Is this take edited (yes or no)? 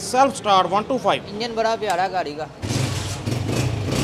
yes